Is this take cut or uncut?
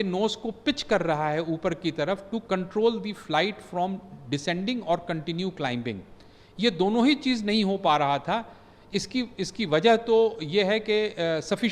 uncut